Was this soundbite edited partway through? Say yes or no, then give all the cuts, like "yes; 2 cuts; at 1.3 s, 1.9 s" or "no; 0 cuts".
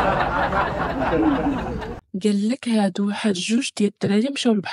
yes; 1 cut; at 1.9 s